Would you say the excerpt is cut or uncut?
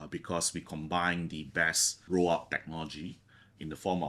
cut